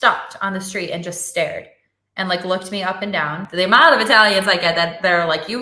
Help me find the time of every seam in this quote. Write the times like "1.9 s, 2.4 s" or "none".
3.4 s